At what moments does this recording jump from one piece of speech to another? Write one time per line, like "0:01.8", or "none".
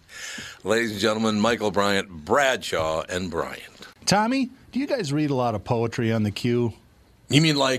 0:03.9